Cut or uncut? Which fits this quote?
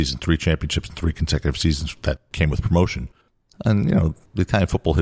cut